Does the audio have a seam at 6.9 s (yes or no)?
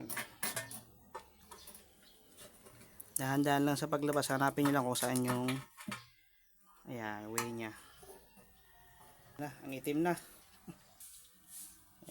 no